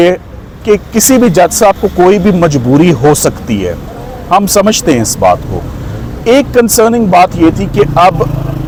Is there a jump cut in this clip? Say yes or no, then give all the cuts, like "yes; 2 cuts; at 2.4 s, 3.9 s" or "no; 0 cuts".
no; 0 cuts